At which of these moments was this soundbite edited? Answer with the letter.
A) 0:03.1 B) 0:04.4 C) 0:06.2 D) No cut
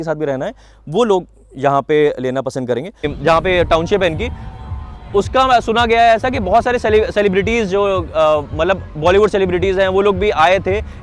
A